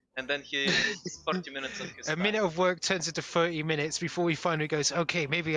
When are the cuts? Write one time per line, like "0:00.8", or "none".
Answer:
0:01.9